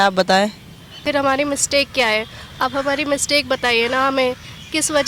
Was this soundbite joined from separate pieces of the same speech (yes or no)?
yes